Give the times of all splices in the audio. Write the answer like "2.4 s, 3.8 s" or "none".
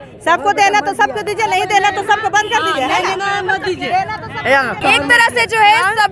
none